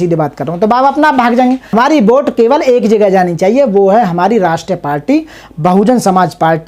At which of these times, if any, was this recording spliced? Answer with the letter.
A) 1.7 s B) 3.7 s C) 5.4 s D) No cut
A